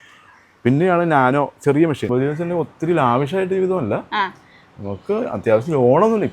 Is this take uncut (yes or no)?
no